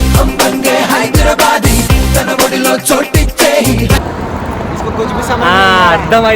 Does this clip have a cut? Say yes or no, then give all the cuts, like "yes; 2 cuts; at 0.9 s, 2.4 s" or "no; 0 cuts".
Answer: yes; 1 cut; at 4.1 s